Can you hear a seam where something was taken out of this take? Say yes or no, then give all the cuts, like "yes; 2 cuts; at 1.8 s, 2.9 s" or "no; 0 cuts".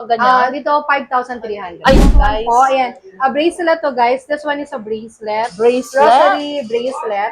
yes; 1 cut; at 2.0 s